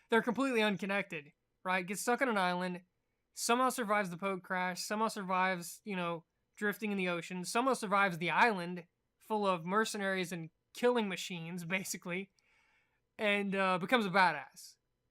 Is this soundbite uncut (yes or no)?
no